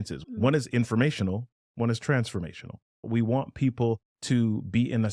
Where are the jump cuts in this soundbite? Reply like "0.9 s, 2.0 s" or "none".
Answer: 3.0 s, 4.1 s